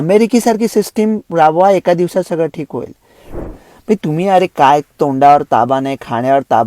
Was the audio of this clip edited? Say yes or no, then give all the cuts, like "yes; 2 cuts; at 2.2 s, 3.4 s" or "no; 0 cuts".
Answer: yes; 1 cut; at 3.4 s